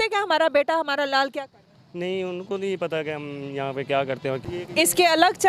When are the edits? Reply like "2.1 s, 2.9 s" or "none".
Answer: 4.4 s